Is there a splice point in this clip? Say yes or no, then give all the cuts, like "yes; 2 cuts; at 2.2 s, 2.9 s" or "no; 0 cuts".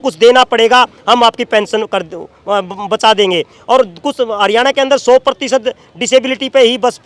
no; 0 cuts